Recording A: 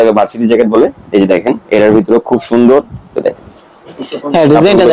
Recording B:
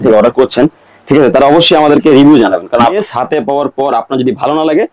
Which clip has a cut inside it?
B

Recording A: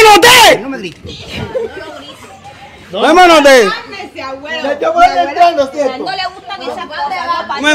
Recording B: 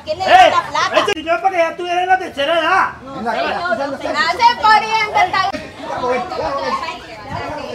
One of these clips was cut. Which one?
B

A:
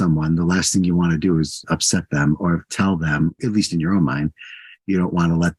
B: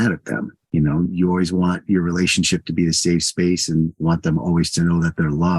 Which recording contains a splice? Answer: B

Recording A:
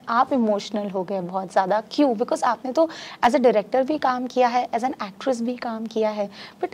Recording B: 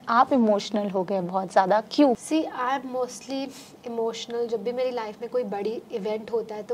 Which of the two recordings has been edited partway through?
B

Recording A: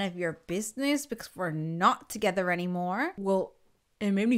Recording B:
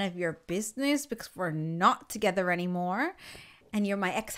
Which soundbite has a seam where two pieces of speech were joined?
A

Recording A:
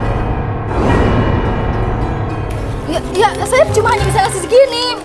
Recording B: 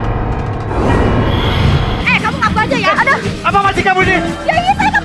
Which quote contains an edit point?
B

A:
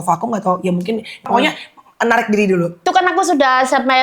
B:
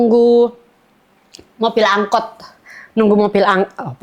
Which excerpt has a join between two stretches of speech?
A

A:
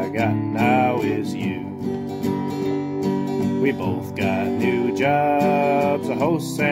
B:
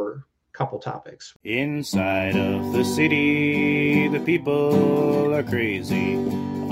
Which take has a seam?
B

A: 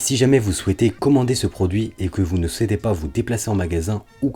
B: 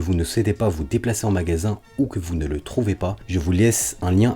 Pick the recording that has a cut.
B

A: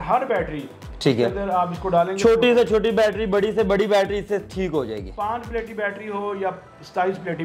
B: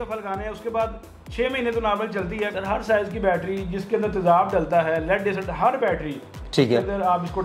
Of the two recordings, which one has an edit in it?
B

